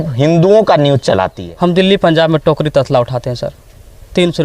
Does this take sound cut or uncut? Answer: cut